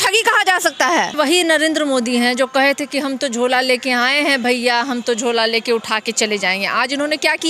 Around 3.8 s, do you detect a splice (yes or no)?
no